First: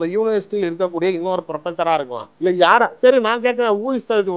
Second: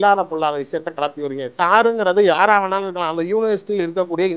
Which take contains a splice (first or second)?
first